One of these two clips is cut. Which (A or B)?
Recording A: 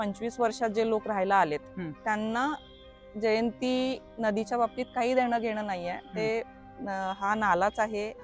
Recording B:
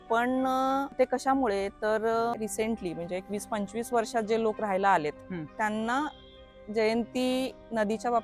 B